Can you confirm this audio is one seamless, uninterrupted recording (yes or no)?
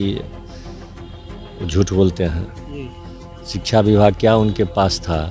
yes